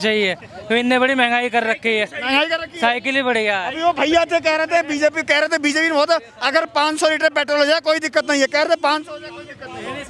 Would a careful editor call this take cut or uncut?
uncut